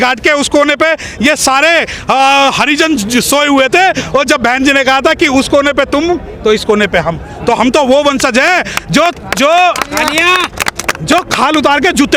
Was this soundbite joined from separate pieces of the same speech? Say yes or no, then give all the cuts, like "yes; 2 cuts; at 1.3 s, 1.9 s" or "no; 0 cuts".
no; 0 cuts